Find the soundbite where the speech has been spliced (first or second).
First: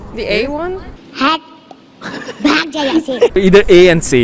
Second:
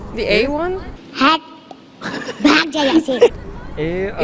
first